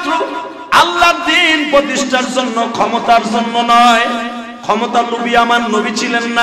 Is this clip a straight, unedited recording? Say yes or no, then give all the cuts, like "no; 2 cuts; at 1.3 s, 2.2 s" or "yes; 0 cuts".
yes; 0 cuts